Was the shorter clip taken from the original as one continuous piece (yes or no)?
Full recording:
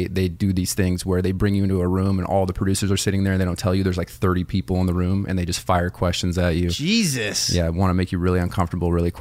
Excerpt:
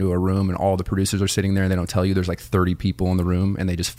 yes